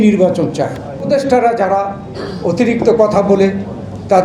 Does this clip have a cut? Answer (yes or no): yes